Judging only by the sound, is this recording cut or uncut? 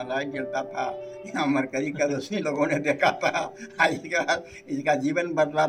uncut